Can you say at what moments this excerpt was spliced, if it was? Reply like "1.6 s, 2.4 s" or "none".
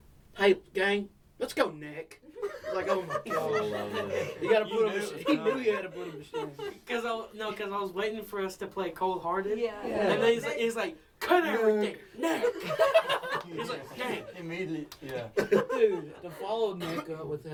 none